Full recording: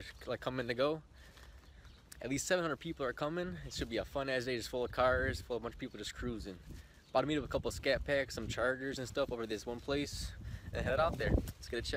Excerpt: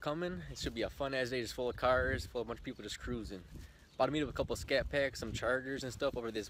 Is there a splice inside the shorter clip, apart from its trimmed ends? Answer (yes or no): no